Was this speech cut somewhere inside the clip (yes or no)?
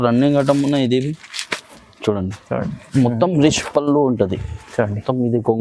yes